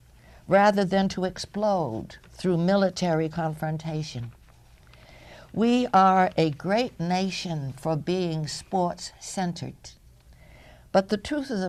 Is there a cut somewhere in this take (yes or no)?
no